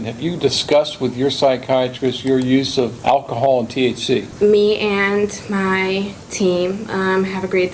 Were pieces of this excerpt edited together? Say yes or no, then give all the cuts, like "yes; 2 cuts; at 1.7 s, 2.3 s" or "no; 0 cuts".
yes; 2 cuts; at 2.9 s, 4.3 s